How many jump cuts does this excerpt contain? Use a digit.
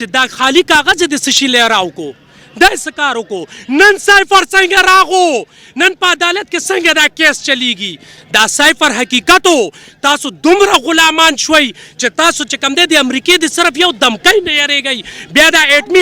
0